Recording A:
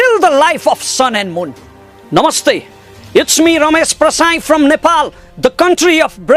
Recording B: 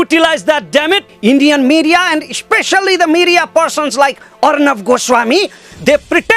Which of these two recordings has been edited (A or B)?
B